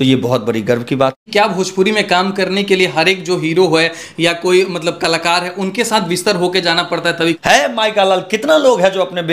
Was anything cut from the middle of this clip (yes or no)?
yes